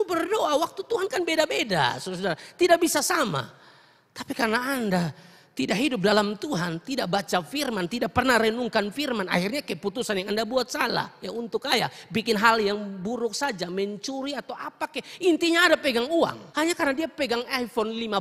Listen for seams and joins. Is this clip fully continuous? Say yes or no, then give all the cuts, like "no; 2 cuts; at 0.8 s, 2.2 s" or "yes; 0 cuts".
no; 1 cut; at 16.4 s